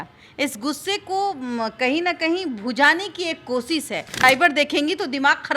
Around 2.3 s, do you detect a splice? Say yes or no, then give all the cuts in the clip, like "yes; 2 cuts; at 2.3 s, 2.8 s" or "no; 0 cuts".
no; 1 cut; at 4.1 s